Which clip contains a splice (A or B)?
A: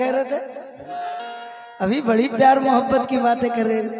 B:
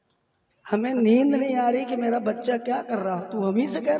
A